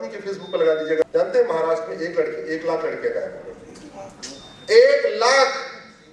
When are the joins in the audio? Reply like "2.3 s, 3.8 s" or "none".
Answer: 1.1 s